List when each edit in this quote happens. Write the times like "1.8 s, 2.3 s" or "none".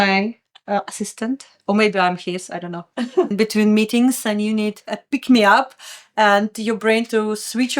3.3 s